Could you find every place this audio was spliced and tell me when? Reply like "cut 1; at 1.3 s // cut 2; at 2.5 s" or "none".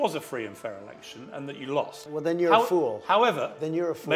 cut 1; at 2.0 s